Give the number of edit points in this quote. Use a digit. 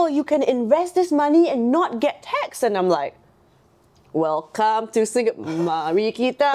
0